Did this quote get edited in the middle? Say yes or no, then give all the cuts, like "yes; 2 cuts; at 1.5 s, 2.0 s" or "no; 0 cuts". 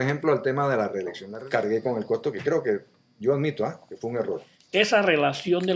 yes; 2 cuts; at 1.2 s, 4.5 s